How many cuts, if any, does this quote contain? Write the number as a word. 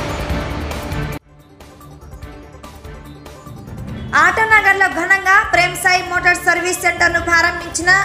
one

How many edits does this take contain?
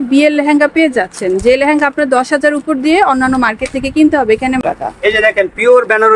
one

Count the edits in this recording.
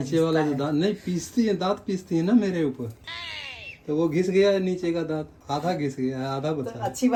zero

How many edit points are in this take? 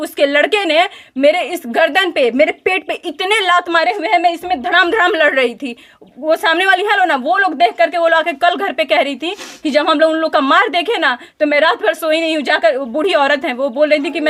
zero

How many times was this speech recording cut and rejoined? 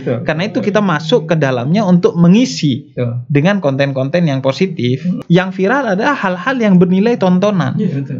one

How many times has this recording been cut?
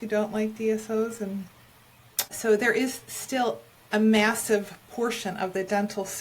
one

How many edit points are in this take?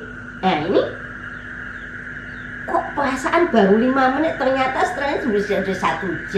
zero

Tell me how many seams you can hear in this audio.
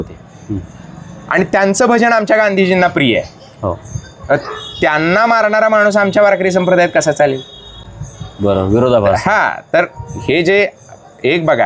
zero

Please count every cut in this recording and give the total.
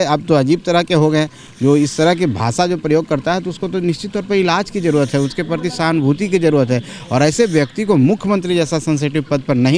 zero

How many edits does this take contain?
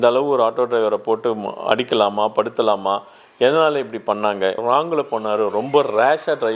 one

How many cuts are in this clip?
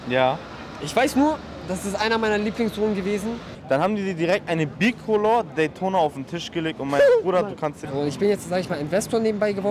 two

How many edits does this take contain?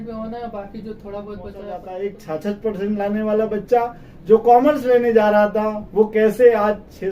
one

